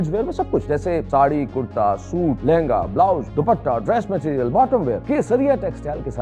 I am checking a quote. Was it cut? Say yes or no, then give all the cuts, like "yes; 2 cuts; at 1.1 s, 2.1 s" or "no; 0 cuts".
yes; 4 cuts; at 0.8 s, 2.4 s, 3.3 s, 5.0 s